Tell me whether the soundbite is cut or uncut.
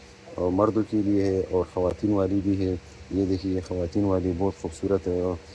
uncut